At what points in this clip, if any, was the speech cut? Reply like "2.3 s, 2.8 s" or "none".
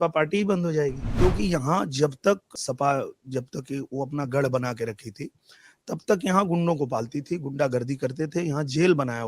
1.0 s, 2.6 s